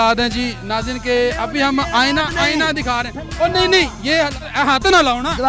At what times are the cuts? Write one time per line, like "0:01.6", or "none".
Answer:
0:04.5